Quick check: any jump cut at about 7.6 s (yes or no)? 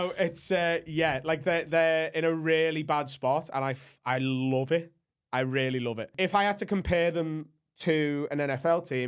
no